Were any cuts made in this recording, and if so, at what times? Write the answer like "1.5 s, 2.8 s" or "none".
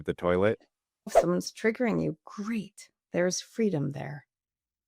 1.2 s